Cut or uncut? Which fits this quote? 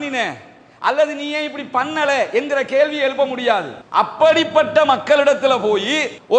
cut